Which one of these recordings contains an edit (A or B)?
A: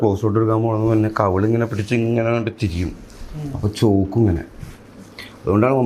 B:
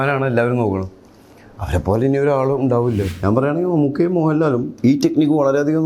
B